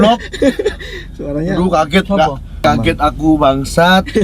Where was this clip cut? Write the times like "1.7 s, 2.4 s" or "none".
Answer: 2.6 s